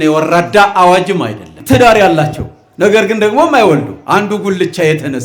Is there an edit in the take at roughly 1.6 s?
yes; 1 cut; at 1.6 s

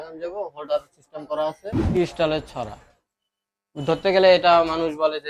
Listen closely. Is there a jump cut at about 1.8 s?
yes; 1 cut; at 1.8 s

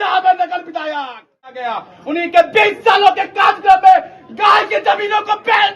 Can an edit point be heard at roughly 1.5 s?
yes; 1 cut; at 1.5 s

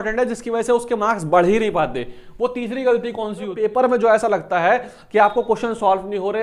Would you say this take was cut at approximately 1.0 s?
no; 1 cut; at 3.5 s

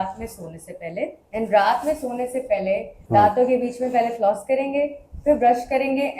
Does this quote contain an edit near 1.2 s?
yes; 2 cuts; at 1.2 s, 2.9 s

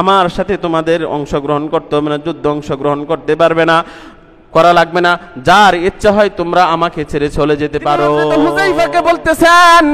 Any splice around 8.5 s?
yes; 1 cut; at 8.5 s

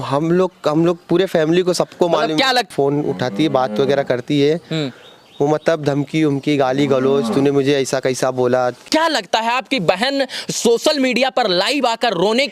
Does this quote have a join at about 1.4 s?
no; 2 cuts; at 2.7 s, 8.8 s

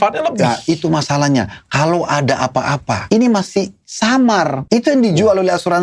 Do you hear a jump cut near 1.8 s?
no; 2 cuts; at 3.0 s, 4.6 s

